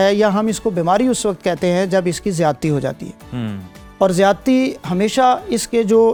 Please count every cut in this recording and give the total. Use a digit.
0